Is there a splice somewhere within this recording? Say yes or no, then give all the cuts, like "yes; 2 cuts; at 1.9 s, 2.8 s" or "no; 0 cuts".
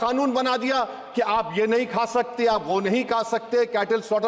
no; 0 cuts